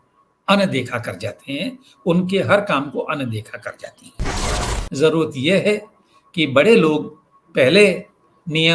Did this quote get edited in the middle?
yes; 1 cut; at 4.1 s

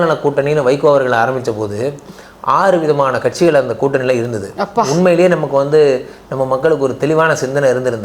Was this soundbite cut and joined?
no; 0 cuts

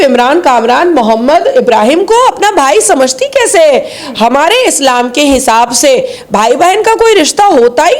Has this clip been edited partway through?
no; 0 cuts

